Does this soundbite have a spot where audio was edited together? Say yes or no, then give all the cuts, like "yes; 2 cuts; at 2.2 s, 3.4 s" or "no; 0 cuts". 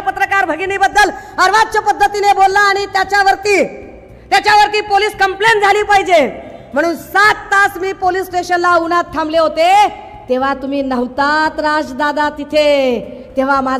no; 0 cuts